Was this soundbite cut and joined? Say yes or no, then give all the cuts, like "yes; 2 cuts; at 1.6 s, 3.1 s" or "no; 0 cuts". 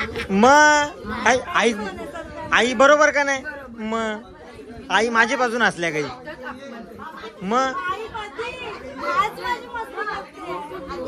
no; 0 cuts